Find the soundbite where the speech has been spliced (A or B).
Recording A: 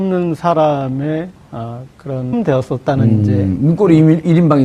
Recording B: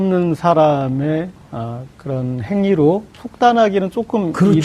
B